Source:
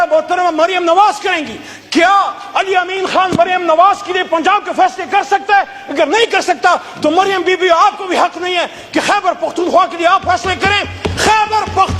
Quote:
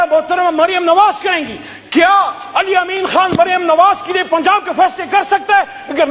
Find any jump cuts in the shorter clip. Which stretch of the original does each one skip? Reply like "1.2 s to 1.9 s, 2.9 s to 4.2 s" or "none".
none